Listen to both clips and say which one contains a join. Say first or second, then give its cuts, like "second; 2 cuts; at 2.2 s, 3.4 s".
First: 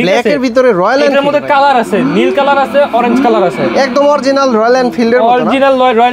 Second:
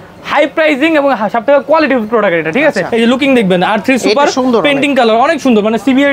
second; 1 cut; at 2.8 s